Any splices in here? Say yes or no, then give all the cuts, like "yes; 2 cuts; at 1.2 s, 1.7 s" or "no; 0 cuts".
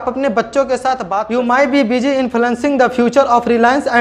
yes; 1 cut; at 1.1 s